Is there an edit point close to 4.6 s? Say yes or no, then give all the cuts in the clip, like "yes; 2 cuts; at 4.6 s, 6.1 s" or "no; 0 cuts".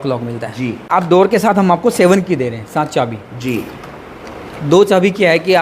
no; 1 cut; at 1.0 s